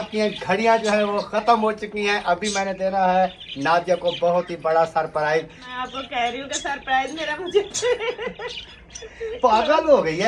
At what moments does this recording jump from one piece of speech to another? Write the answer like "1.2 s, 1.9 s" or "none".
5.6 s